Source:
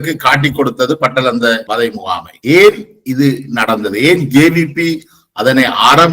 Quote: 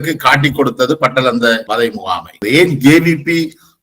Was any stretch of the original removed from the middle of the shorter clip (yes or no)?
yes